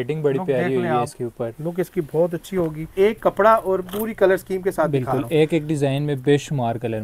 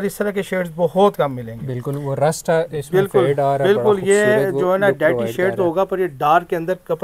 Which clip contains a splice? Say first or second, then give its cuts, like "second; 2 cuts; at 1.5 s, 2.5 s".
first; 1 cut; at 2.9 s